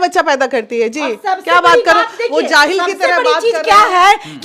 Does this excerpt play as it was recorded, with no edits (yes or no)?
yes